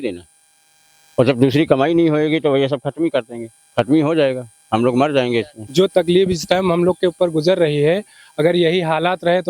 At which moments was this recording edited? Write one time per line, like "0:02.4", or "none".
0:05.6